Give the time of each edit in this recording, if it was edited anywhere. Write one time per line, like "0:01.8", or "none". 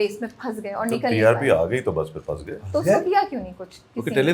none